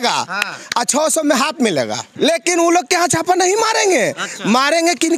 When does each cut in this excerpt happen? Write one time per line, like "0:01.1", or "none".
0:02.0